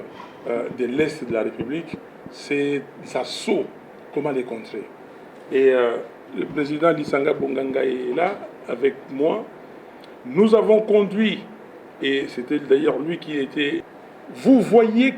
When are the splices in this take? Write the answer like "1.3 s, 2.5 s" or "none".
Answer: 13.8 s

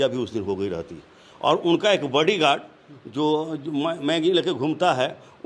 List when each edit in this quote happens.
none

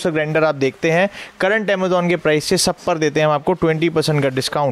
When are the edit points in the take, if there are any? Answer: none

